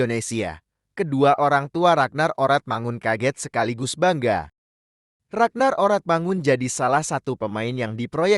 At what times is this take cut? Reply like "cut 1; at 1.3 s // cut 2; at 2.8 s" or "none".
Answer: none